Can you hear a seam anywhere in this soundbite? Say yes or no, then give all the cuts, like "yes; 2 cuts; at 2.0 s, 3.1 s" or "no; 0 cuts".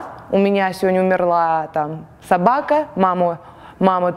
no; 0 cuts